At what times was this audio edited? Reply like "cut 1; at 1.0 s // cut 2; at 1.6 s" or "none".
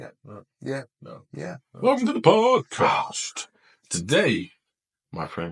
cut 1; at 1.6 s